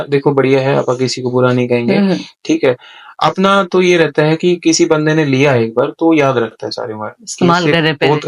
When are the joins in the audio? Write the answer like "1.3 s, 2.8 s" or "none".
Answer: none